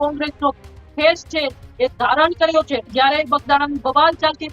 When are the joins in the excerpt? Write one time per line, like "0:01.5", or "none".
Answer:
0:02.9